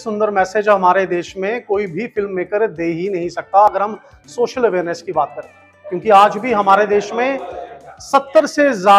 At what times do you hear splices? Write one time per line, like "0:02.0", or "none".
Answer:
none